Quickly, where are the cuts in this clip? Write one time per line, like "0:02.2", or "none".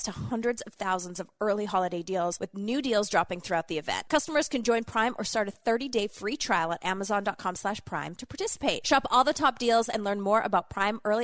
0:02.4
0:04.0
0:08.8